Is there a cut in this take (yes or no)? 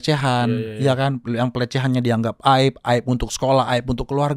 no